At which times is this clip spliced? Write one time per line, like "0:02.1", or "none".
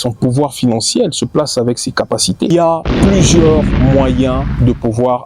0:02.5